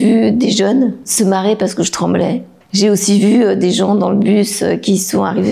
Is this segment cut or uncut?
cut